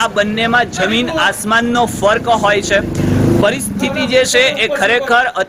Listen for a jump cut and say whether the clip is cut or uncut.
uncut